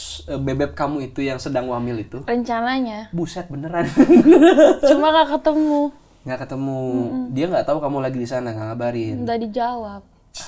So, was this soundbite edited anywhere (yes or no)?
no